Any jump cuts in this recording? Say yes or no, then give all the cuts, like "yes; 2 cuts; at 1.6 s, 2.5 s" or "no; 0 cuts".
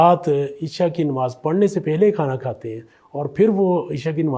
no; 0 cuts